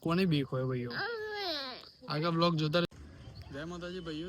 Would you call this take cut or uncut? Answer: cut